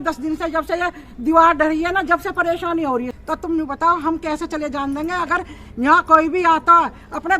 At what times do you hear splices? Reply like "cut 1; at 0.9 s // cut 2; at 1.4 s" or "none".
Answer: cut 1; at 3.2 s